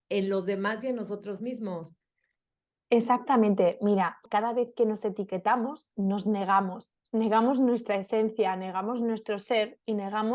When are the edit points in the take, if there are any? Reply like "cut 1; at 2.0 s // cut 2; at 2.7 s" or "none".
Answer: cut 1; at 4.2 s

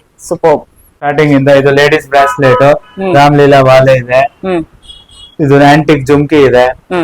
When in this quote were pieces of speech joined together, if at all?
cut 1; at 1.1 s

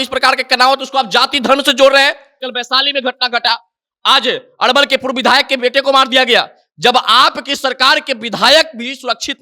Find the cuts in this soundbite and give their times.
cut 1; at 2.5 s

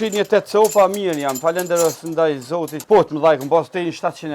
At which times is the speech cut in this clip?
cut 1; at 2.8 s

